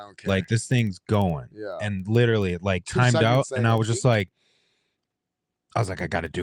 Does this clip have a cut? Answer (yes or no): no